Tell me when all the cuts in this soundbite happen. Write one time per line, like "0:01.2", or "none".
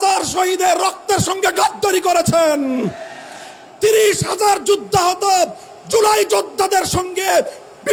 none